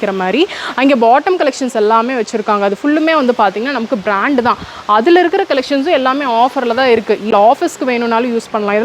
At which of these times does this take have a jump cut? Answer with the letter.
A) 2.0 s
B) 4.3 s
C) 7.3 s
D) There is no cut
C